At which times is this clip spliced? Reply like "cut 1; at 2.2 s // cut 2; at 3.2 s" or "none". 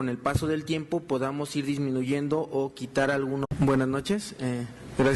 none